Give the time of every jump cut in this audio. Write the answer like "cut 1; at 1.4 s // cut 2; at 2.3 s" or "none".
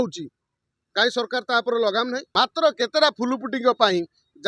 cut 1; at 2.2 s